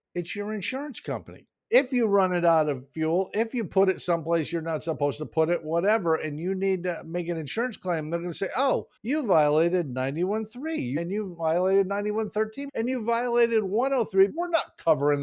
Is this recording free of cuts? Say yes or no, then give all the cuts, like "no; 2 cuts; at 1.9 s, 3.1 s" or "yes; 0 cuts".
no; 5 cuts; at 1.5 s, 8.9 s, 11.0 s, 12.6 s, 14.4 s